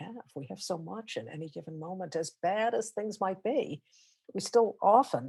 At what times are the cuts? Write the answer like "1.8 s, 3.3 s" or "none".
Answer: none